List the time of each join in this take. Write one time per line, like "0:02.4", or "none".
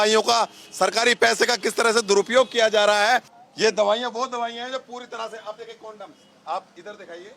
0:03.4